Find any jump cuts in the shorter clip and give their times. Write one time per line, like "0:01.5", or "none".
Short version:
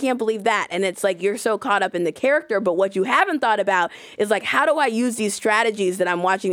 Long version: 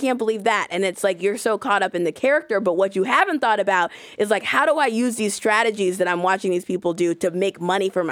none